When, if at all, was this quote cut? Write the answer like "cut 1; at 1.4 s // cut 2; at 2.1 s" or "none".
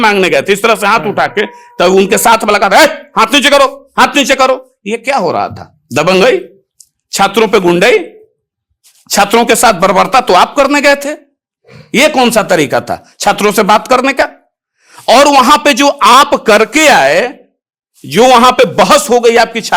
none

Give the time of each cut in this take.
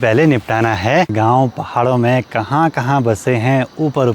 cut 1; at 1.1 s

